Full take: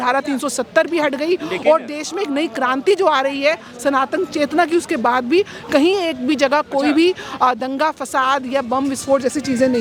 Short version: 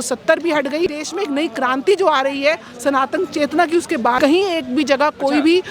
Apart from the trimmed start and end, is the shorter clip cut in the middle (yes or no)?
yes